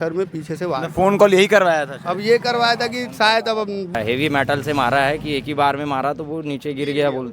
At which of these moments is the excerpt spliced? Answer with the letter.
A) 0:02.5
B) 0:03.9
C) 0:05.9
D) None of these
B